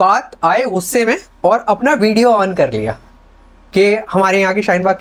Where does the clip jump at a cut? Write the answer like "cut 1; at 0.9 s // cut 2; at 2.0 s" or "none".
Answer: none